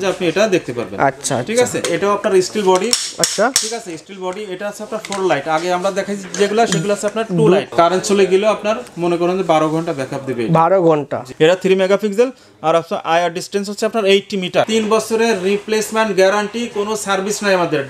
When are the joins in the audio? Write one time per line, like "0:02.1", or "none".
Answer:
0:01.8
0:07.7
0:11.2
0:14.7